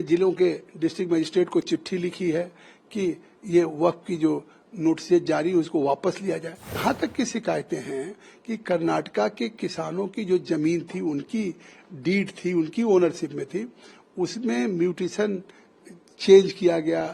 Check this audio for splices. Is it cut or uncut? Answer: cut